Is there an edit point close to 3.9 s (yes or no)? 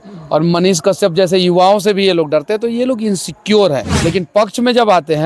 yes